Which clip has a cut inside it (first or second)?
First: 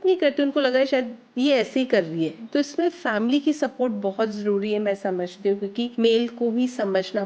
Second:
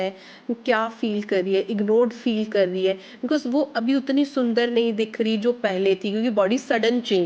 first